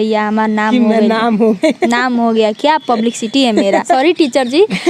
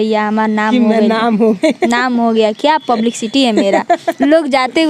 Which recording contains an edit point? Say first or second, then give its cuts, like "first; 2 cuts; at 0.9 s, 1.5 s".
first; 1 cut; at 4.0 s